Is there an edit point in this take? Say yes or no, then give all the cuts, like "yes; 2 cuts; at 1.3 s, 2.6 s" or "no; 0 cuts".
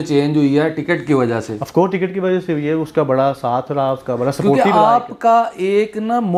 no; 0 cuts